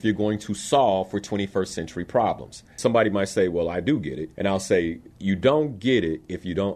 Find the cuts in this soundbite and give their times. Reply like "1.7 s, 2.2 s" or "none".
2.7 s, 4.2 s, 5.1 s